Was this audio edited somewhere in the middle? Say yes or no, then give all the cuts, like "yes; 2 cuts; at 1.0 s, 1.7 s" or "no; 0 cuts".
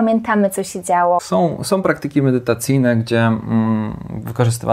yes; 1 cut; at 1.2 s